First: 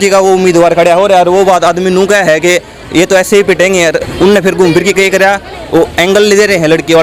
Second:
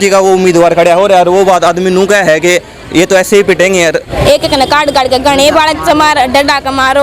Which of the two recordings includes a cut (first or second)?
second